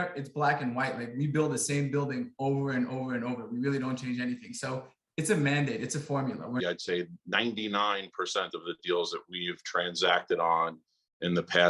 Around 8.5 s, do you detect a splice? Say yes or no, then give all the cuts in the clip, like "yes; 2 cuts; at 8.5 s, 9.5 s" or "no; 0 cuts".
no; 1 cut; at 6.6 s